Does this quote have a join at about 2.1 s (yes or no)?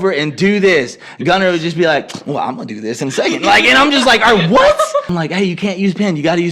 no